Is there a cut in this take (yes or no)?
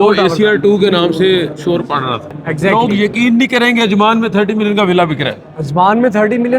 yes